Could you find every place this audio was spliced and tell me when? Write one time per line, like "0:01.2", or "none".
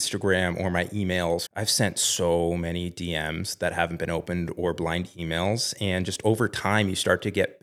0:01.5